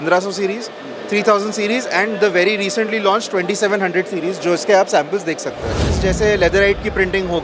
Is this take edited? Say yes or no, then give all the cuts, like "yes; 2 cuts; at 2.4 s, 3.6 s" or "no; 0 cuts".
yes; 1 cut; at 5.9 s